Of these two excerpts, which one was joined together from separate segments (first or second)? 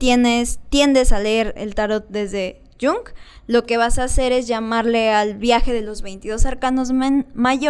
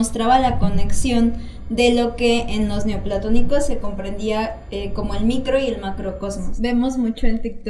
second